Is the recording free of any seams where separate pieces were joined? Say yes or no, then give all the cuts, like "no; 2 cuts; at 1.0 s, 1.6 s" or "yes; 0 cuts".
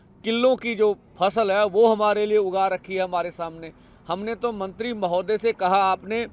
yes; 0 cuts